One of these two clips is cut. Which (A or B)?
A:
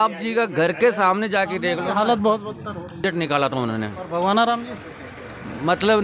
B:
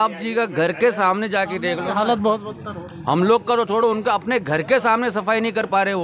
A